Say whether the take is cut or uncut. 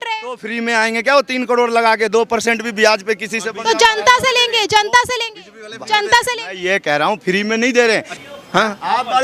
cut